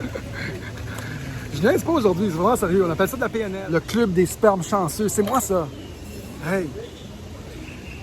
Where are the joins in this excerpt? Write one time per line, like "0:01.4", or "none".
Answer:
0:03.5